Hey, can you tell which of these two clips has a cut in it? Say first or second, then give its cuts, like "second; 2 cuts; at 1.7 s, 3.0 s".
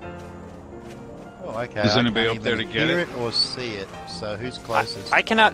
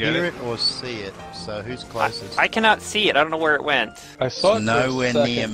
second; 1 cut; at 4.0 s